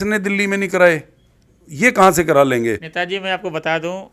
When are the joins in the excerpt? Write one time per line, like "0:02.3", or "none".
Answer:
0:02.9